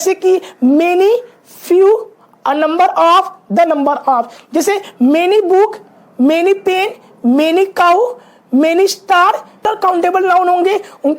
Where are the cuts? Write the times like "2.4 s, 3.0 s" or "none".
9.7 s